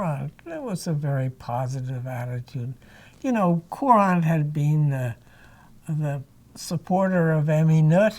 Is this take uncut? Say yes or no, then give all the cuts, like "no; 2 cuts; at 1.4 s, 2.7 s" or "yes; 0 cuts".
yes; 0 cuts